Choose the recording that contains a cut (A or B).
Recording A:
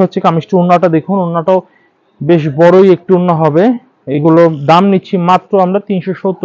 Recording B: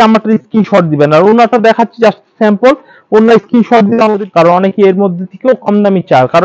B